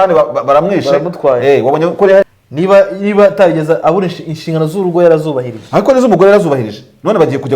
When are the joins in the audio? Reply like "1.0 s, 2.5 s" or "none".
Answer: 2.3 s